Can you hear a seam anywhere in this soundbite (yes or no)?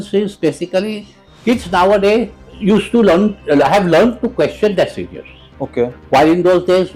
no